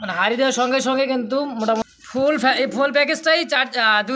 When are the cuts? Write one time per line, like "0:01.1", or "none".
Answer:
0:01.8

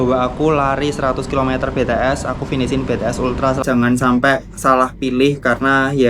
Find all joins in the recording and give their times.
0:03.6

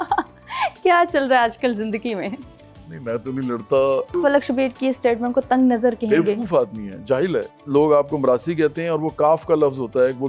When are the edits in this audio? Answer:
0:04.2
0:07.6

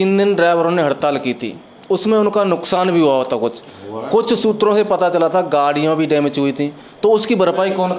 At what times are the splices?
none

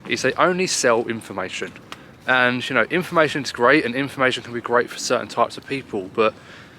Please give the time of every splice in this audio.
none

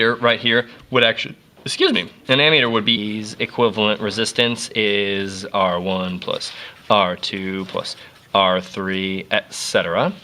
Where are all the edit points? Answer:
none

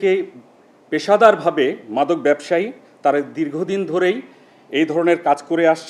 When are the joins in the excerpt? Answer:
none

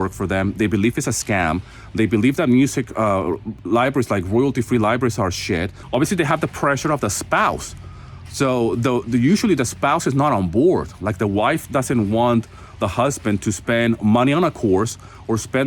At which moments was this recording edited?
0:05.8

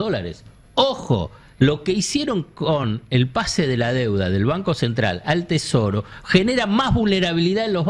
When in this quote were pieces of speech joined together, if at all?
none

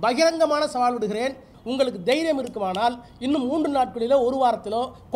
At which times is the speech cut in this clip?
0:01.5

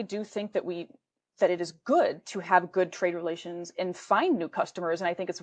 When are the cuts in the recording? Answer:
none

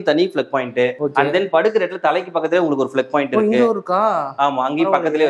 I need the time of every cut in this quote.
none

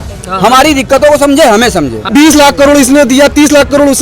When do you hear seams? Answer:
0:02.0

